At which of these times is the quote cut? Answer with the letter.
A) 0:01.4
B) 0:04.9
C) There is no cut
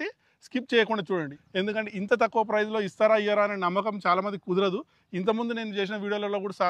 A